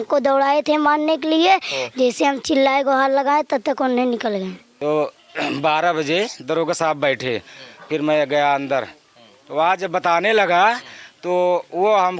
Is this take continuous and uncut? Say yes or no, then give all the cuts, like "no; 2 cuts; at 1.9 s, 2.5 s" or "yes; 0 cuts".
no; 1 cut; at 4.6 s